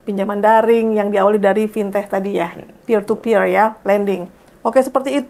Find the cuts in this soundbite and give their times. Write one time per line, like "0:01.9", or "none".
none